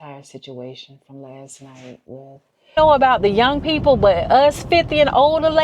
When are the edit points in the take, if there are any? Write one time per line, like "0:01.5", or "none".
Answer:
0:02.7

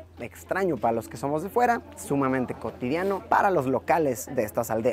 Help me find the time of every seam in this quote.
none

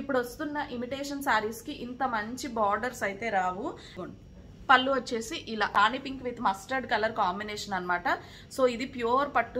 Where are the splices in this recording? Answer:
0:04.0
0:05.7

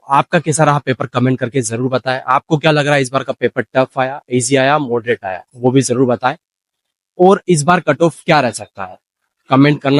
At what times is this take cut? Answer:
none

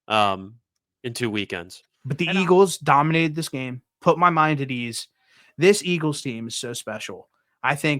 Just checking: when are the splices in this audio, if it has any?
0:01.9

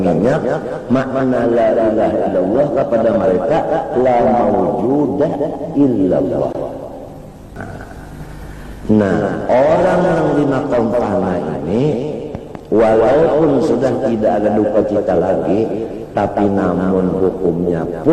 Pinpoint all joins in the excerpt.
0:07.6

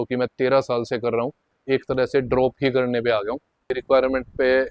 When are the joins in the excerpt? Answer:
0:01.6
0:03.7

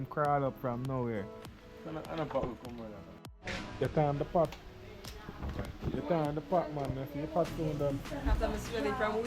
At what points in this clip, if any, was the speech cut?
0:03.3

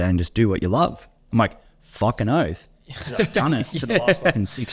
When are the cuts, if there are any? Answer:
none

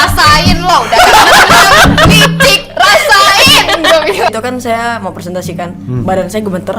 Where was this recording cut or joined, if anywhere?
0:04.3

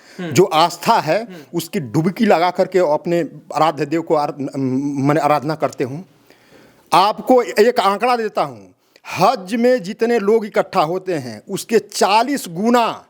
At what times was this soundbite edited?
none

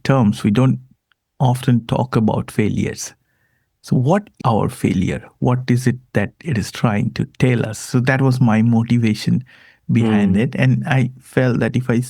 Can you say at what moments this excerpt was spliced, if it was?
none

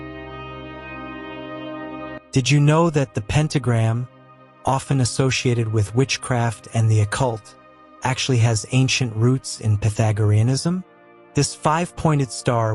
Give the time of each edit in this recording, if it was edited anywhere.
0:00.9

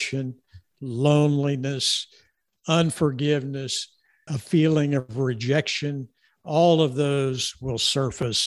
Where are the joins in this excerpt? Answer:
0:04.4

